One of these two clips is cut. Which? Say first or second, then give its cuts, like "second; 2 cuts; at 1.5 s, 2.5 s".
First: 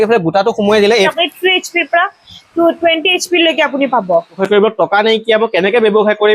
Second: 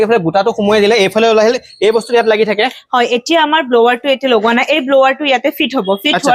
first; 2 cuts; at 1.1 s, 4.4 s